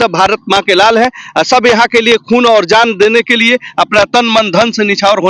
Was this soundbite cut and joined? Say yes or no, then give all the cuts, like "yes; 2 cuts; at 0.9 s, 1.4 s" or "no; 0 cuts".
no; 0 cuts